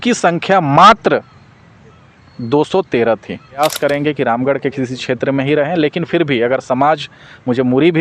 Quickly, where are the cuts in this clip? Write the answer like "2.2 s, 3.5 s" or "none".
3.6 s